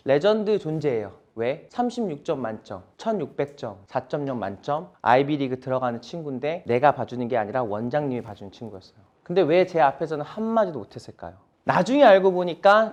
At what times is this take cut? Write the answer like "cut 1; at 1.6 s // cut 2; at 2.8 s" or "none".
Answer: none